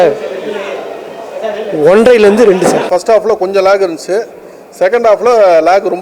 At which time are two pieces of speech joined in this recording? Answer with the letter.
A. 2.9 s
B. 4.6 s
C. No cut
A